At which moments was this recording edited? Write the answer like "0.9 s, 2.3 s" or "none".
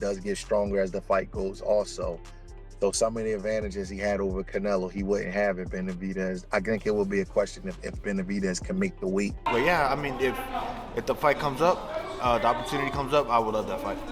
9.5 s